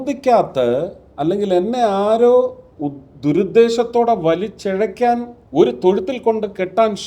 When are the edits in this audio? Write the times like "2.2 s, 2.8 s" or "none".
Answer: 5.4 s